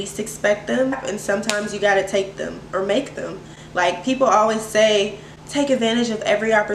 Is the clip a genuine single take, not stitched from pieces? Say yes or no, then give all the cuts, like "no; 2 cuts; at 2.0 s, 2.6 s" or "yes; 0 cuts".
yes; 0 cuts